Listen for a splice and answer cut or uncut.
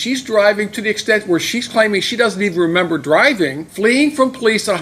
cut